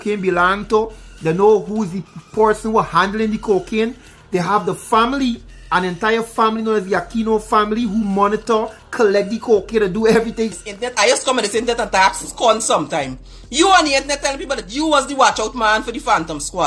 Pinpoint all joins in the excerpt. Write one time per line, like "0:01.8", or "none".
0:10.5